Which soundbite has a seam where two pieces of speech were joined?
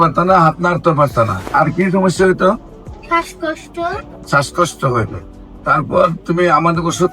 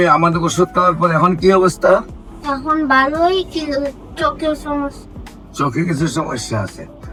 first; 2 cuts; at 1.4 s, 4.1 s

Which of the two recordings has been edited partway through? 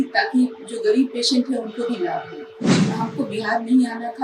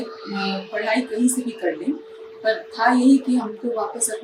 first; 1 cut; at 2.8 s

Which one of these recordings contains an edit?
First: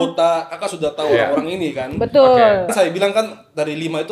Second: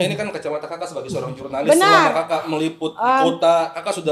first; 1 cut; at 2.7 s

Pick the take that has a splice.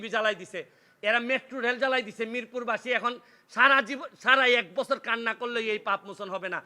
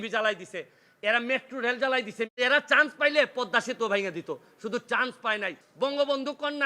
second; 2 cuts; at 2.3 s, 5.6 s

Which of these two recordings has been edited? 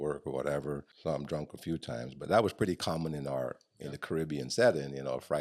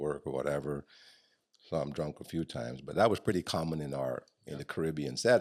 first; 1 cut; at 0.9 s

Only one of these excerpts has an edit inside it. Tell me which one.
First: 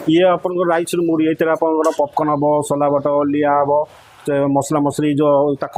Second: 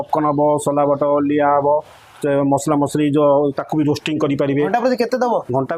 second; 1 cut; at 4.7 s

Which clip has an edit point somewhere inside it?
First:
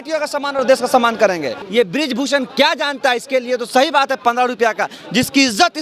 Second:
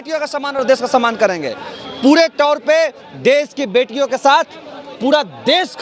first; 1 cut; at 1.6 s

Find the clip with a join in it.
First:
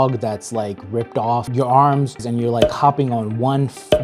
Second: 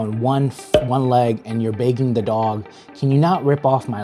first; 2 cuts; at 1.5 s, 2.2 s

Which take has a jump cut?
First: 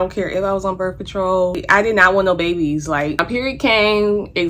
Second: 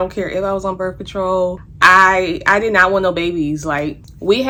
first; 2 cuts; at 1.6 s, 3.3 s

